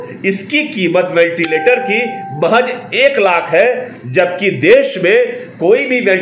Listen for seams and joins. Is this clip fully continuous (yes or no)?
yes